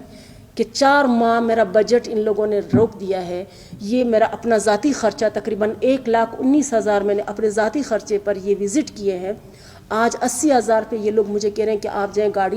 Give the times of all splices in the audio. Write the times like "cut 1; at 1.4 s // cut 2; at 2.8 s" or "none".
none